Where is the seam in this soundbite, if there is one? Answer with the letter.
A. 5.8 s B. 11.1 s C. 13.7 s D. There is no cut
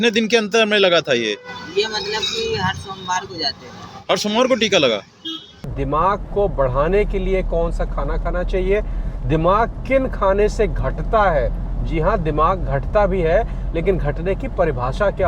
A